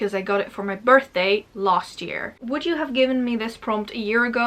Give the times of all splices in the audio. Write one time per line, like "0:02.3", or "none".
0:02.4